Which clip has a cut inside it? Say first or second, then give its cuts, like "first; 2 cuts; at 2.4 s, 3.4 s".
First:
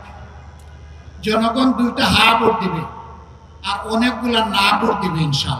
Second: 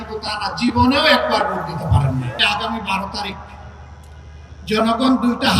second; 1 cut; at 2.3 s